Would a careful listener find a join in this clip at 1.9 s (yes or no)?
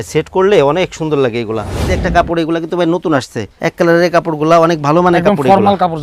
yes